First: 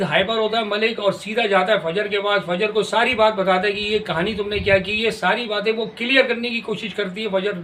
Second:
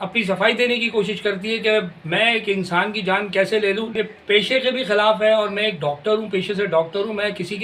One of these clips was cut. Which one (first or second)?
second